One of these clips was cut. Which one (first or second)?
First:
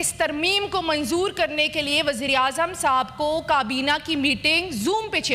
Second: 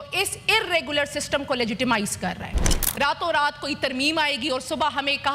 second